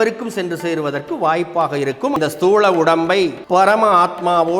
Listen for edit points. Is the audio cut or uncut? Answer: cut